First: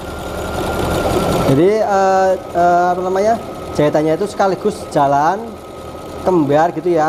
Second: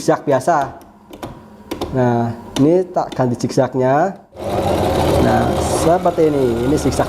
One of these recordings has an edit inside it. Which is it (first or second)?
second